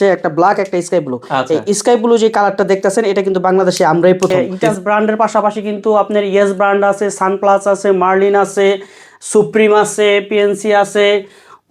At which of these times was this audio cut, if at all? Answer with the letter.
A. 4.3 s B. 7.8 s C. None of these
A